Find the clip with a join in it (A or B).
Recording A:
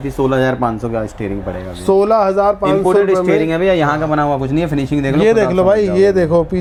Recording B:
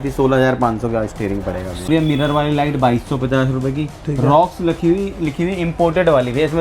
B